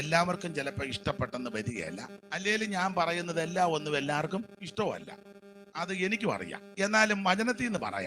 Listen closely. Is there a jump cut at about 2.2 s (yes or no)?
yes